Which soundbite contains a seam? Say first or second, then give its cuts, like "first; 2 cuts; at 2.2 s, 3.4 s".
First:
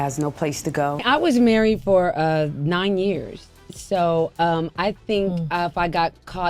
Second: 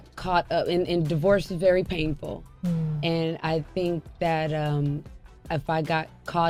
first; 1 cut; at 1.0 s